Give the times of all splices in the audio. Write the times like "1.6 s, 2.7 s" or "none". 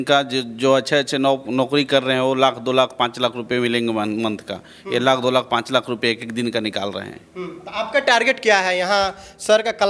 none